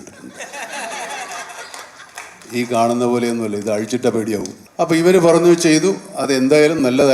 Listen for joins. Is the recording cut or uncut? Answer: cut